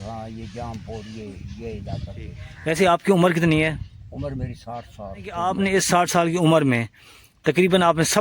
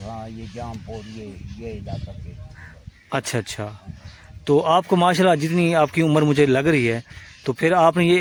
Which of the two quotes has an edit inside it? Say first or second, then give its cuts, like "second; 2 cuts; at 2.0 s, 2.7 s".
first; 2 cuts; at 2.5 s, 5.4 s